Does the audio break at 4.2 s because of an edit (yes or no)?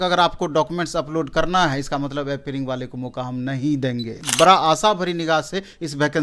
yes